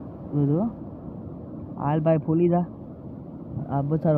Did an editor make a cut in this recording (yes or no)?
no